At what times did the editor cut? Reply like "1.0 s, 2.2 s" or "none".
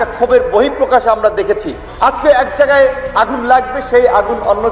1.8 s